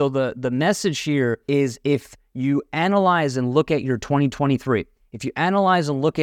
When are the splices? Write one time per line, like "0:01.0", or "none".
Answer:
0:01.4